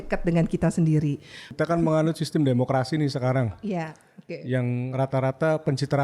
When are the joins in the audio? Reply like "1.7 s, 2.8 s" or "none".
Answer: 1.4 s